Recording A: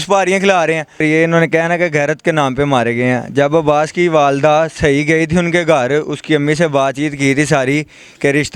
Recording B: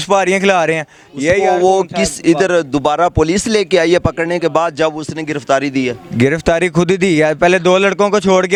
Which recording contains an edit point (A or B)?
A